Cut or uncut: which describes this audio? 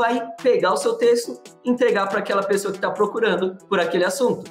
uncut